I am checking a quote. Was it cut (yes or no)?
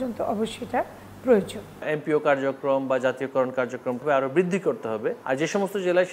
yes